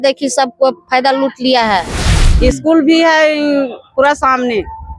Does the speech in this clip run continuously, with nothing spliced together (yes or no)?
no